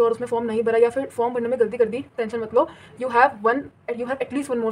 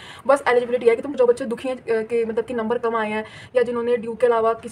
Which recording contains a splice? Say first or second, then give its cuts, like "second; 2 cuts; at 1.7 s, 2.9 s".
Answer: second; 1 cut; at 1.1 s